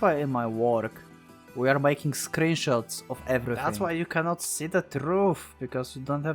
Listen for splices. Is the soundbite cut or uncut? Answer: cut